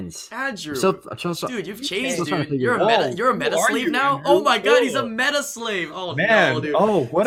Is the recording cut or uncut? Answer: uncut